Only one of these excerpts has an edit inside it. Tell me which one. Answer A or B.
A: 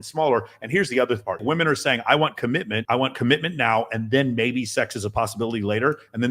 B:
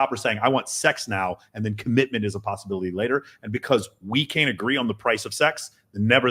A